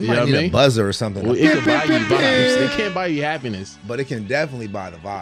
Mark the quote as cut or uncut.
uncut